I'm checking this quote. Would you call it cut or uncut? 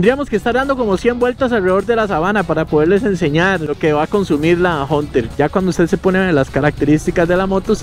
cut